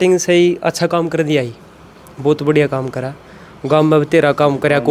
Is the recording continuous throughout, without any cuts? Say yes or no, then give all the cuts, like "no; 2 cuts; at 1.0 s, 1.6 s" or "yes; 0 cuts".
yes; 0 cuts